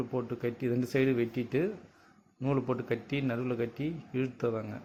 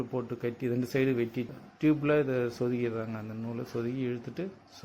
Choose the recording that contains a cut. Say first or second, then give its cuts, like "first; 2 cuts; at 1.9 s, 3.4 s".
second; 1 cut; at 1.5 s